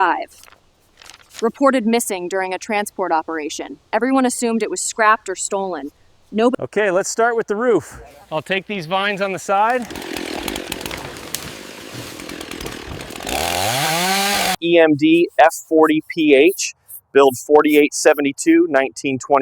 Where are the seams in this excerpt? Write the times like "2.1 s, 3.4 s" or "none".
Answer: 6.6 s, 14.6 s